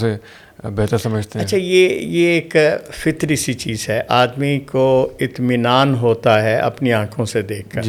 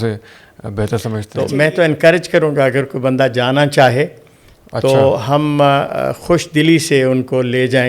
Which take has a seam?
second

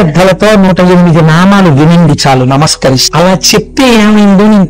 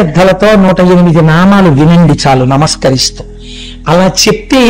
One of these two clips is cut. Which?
first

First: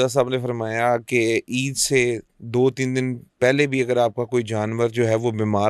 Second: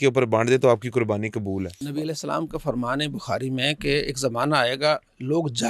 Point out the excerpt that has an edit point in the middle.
second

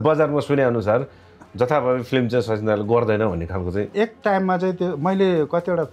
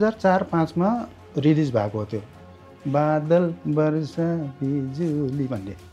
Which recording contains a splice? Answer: first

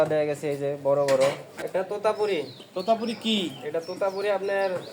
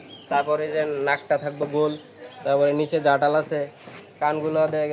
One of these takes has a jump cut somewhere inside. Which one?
first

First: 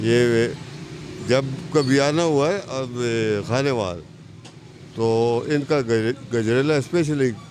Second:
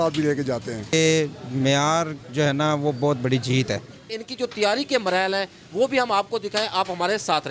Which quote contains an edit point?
second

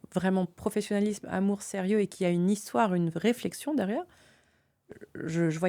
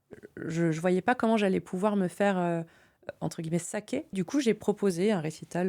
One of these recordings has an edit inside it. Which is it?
second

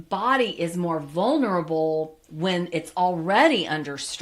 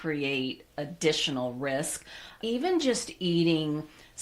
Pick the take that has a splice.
second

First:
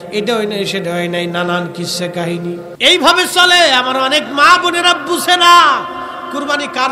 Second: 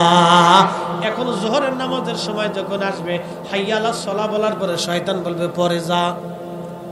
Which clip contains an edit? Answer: first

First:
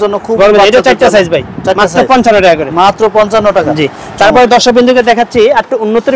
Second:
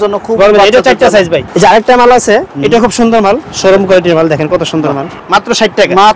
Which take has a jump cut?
second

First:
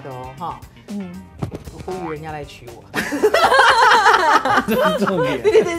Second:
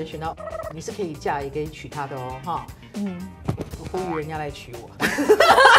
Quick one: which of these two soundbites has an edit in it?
first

